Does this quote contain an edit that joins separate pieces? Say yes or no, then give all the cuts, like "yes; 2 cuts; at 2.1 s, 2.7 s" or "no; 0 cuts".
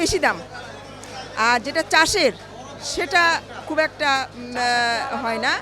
no; 0 cuts